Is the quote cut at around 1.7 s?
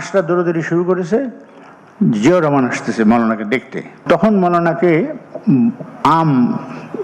no; 1 cut; at 4.0 s

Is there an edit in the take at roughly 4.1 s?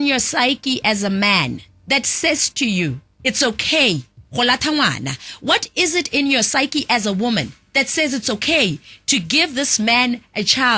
no; 2 cuts; at 1.7 s, 7.6 s

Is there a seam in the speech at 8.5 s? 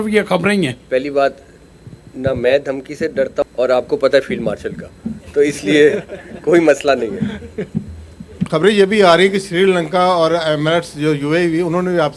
yes; 1 cut; at 8.5 s

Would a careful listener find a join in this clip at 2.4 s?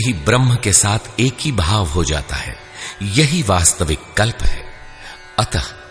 no; 0 cuts

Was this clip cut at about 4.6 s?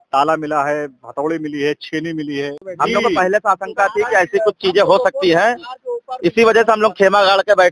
no; 1 cut; at 2.6 s

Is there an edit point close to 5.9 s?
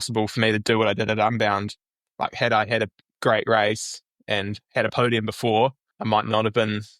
yes; 1 cut; at 5.9 s

